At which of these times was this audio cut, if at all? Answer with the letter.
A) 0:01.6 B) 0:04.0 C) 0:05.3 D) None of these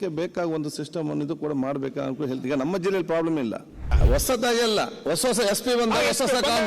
B